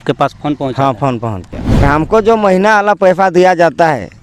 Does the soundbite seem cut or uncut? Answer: cut